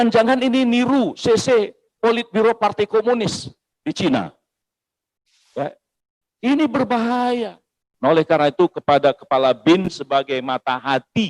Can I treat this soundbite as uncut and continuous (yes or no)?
no